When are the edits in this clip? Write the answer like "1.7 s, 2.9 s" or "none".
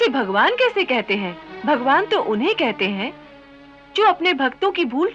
1.4 s